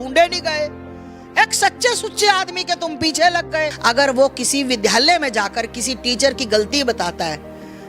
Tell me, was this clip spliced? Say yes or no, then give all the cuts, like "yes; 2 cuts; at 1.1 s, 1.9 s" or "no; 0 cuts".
yes; 1 cut; at 3.8 s